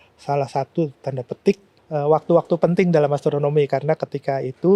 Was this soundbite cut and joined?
yes; 1 cut; at 1.8 s

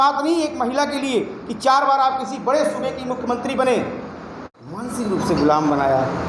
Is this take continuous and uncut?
no; 1 cut; at 4.9 s

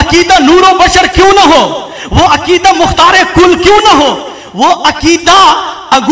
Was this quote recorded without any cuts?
yes; 0 cuts

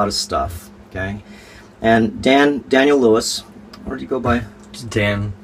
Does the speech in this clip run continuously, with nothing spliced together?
yes; 0 cuts

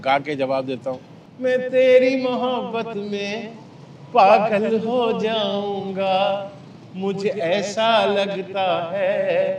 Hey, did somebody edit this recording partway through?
no; 0 cuts

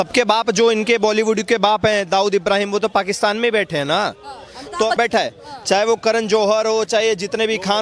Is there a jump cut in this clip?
yes; 1 cut; at 5.0 s

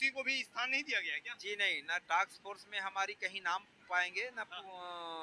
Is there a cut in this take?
no; 0 cuts

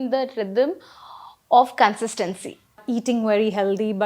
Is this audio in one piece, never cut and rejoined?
no; 1 cut; at 2.8 s

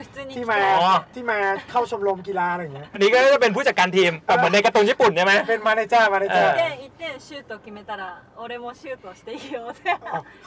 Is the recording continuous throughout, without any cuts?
no; 1 cut; at 2.9 s

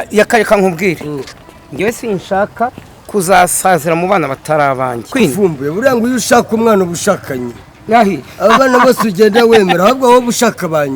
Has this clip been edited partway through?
yes; 1 cut; at 5.1 s

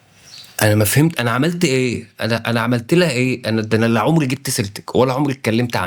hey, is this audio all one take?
yes; 0 cuts

